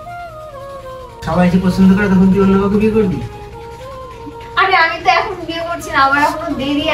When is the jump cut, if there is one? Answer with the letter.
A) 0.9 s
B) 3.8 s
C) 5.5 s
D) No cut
A